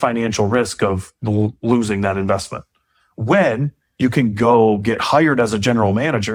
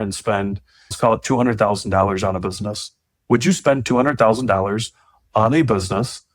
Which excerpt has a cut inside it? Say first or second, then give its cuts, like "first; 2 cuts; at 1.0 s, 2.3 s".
second; 1 cut; at 0.9 s